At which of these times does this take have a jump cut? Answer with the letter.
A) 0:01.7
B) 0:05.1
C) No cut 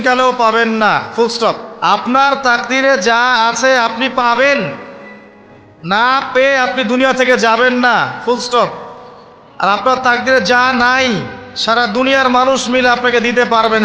A